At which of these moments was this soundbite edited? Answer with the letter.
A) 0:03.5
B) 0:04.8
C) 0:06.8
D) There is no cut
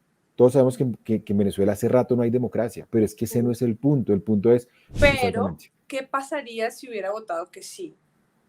B